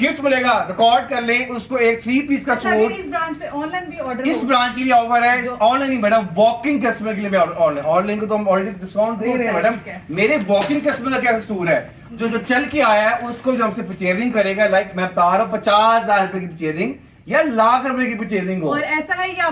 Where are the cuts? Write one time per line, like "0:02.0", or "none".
none